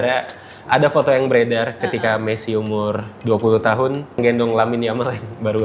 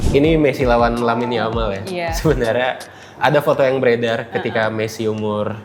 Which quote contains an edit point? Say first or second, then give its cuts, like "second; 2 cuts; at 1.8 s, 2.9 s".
first; 1 cut; at 4.2 s